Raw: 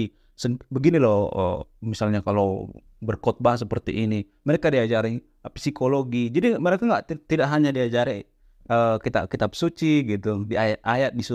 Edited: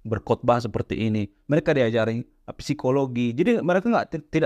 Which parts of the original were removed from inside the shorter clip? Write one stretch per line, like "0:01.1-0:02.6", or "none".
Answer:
none